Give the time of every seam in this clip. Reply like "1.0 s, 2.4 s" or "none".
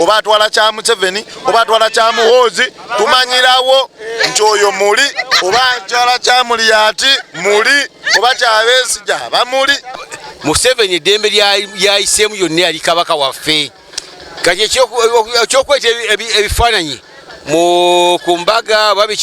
5.2 s, 9.9 s